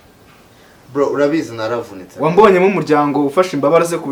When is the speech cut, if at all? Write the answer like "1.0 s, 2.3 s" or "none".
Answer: none